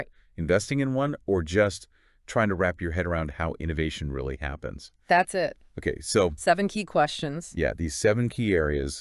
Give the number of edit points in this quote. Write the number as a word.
zero